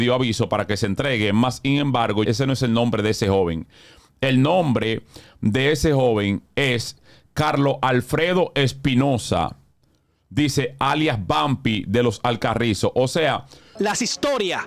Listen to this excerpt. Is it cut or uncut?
cut